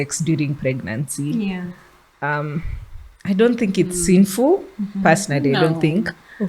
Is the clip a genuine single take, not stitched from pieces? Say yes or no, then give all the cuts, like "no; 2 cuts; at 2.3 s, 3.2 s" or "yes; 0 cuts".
yes; 0 cuts